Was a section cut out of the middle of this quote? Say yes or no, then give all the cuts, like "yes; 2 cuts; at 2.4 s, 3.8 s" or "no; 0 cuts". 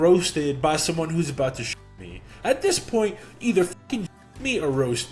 no; 0 cuts